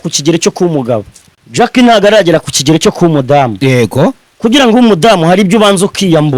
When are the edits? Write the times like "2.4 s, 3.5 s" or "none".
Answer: 1.2 s